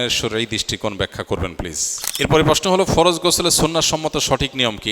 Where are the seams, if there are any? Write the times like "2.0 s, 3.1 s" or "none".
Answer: 2.0 s